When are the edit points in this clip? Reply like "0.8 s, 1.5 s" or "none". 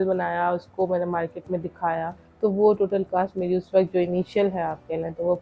2.2 s